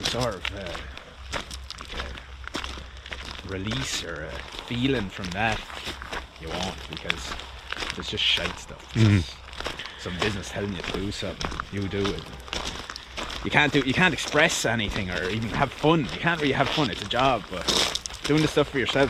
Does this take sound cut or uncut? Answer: uncut